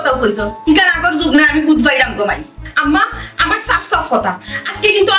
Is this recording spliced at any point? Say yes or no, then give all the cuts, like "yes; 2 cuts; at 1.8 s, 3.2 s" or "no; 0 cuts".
no; 0 cuts